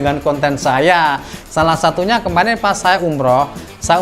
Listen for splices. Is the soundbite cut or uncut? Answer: cut